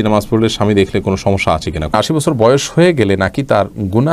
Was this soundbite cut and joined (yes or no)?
yes